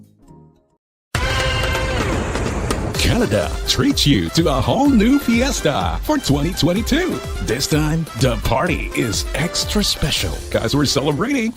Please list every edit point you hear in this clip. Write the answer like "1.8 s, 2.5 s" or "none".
1.3 s